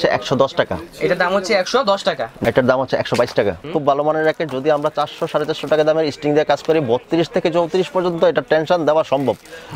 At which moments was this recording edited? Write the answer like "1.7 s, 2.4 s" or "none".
2.3 s, 3.6 s